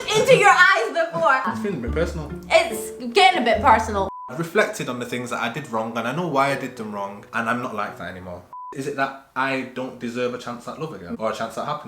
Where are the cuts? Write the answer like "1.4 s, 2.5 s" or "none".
1.5 s, 4.1 s, 8.5 s, 11.1 s